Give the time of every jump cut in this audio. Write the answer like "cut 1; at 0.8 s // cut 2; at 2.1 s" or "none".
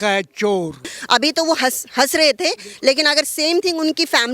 cut 1; at 0.9 s